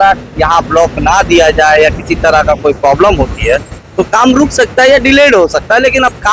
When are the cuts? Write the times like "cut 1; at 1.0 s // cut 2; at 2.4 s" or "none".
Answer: none